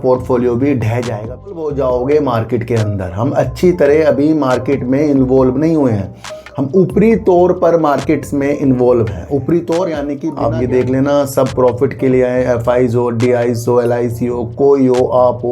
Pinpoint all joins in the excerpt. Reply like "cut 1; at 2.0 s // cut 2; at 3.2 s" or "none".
cut 1; at 1.6 s // cut 2; at 10.3 s